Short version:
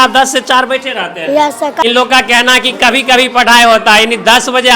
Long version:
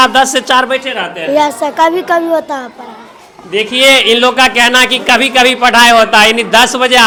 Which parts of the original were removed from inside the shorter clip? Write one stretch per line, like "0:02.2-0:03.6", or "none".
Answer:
0:01.8-0:04.1